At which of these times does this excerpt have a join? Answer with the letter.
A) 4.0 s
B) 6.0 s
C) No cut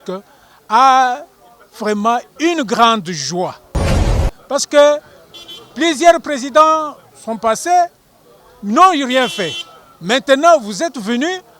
A